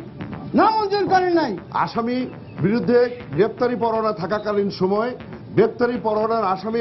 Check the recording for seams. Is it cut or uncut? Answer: cut